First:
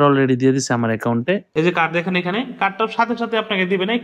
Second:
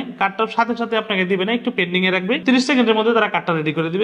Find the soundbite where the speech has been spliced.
first; 1 cut; at 1.5 s

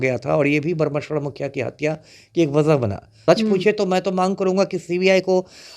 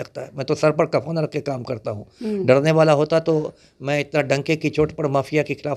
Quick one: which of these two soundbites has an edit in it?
first; 1 cut; at 3.1 s

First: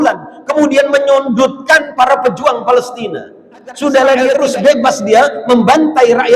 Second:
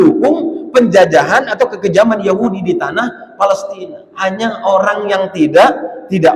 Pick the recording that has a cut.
first; 1 cut; at 4.4 s

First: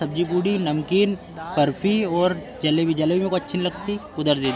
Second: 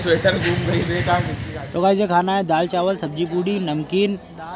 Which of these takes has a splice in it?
second; 1 cut; at 1.7 s

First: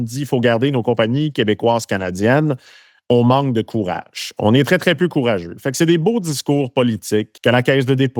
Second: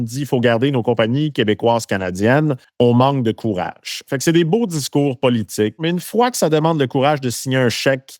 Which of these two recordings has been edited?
second; 3 cuts; at 2.6 s, 4.0 s, 5.8 s

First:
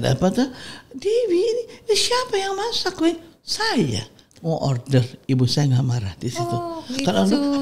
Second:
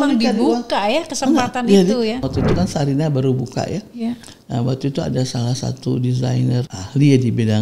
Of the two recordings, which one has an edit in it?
second; 2 cuts; at 2.2 s, 6.7 s

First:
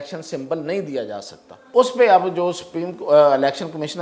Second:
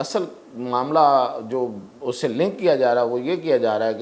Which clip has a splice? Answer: first; 1 cut; at 1.7 s

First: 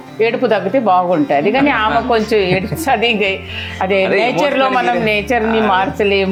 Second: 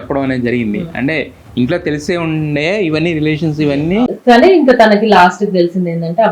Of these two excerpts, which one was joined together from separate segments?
second; 1 cut; at 4.1 s

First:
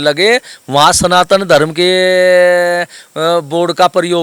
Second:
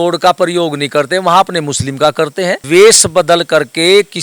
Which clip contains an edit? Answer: second; 1 cut; at 2.6 s

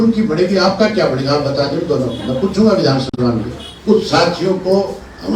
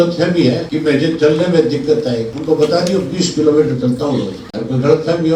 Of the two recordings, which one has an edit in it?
first; 1 cut; at 3.7 s

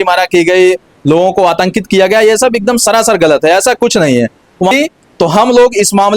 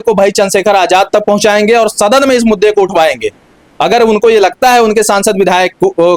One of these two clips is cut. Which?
first; 1 cut; at 4.7 s

